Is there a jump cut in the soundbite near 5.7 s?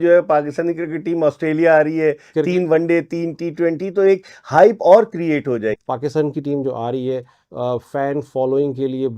yes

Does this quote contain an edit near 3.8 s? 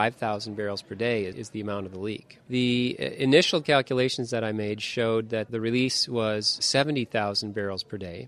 no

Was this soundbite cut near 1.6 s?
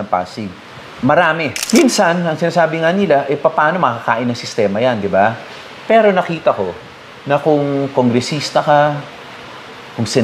yes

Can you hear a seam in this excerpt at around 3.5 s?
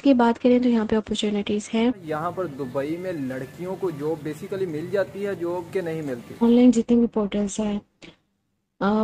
no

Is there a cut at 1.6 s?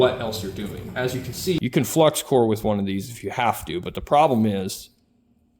yes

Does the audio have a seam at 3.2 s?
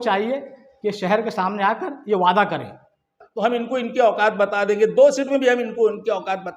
yes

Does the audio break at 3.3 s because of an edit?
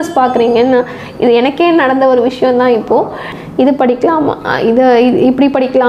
yes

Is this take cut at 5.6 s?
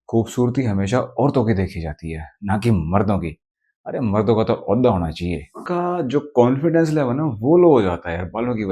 yes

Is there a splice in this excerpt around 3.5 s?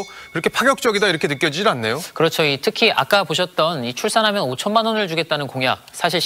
no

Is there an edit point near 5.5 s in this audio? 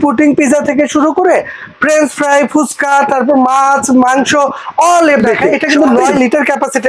yes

